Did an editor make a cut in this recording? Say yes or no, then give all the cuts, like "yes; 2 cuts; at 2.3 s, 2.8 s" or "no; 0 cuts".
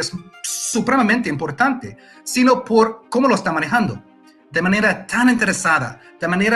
no; 0 cuts